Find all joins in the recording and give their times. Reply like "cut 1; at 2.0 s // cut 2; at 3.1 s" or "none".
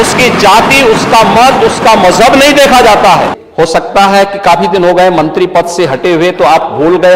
cut 1; at 3.4 s